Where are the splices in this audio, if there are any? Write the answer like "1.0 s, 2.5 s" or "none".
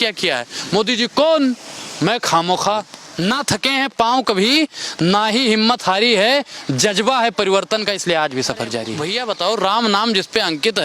3.0 s, 9.0 s